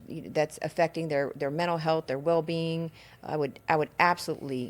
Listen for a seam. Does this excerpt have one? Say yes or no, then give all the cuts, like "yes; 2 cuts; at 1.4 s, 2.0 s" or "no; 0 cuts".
no; 0 cuts